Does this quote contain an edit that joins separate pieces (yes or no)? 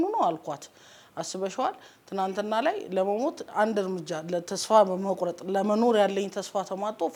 no